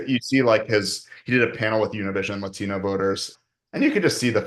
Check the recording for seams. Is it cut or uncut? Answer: cut